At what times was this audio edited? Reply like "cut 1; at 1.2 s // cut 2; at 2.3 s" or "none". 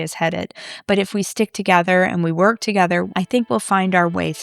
cut 1; at 3.1 s